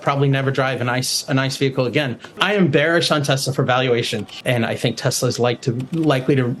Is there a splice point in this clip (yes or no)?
yes